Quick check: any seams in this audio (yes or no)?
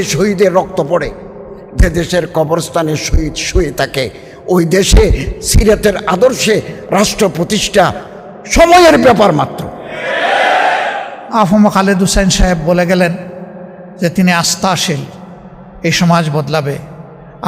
yes